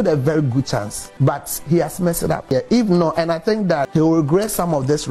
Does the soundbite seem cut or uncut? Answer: cut